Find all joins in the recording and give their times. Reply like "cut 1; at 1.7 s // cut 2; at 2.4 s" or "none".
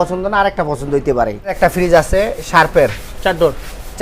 cut 1; at 1.6 s

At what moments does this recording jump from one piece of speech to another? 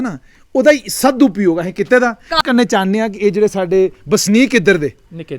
cut 1; at 2.4 s

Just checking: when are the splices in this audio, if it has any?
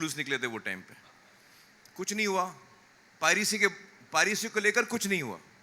none

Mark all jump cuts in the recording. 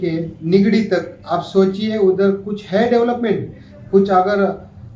none

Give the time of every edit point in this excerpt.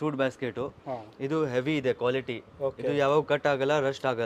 none

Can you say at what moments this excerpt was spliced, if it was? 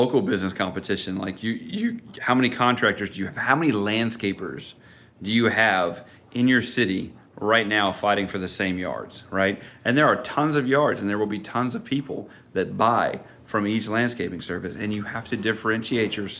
none

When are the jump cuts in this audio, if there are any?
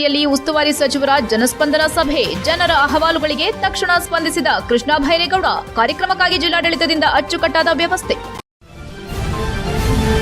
cut 1; at 8.3 s

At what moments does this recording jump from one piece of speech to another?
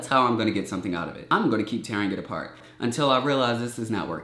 cut 1; at 1.2 s // cut 2; at 2.6 s

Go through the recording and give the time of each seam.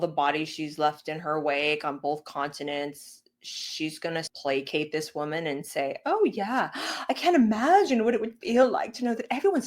cut 1; at 4.3 s

